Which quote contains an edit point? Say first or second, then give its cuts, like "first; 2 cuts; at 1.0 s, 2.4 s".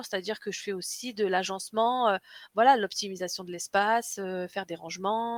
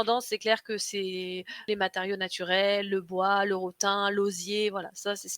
second; 1 cut; at 1.6 s